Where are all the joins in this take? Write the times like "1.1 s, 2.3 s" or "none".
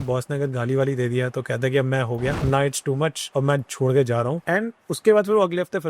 2.4 s, 3.2 s, 4.4 s

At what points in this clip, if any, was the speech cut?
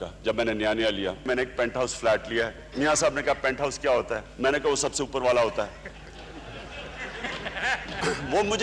1.2 s

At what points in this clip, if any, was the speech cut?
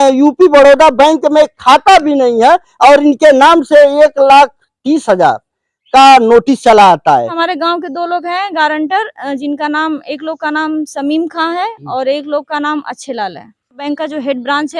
7.4 s, 13.8 s

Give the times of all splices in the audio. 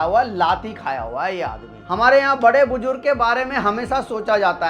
1.8 s

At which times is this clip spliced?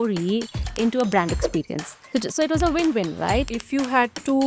1.9 s, 3.5 s

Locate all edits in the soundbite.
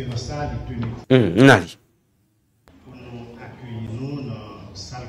none

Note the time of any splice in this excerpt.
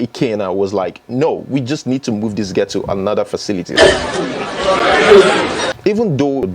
3.7 s, 5.7 s

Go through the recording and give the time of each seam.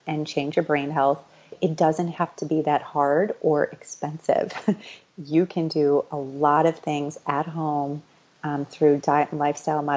1.5 s

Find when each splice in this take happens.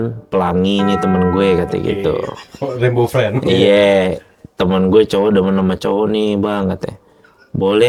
none

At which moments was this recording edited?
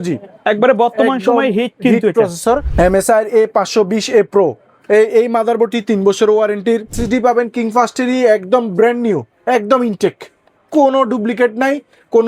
2.6 s, 6.9 s

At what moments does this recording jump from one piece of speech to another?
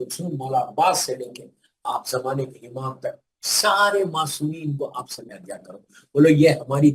5.1 s

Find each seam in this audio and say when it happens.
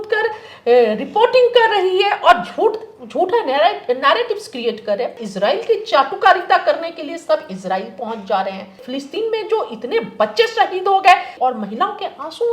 5.2 s, 8.9 s, 11.3 s

